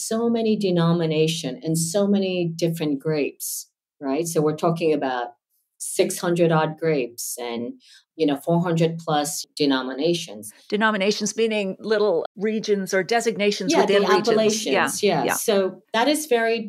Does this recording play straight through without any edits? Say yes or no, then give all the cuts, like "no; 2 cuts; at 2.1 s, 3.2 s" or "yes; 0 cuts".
yes; 0 cuts